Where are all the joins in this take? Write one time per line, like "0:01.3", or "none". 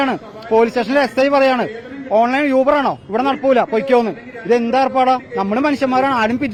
none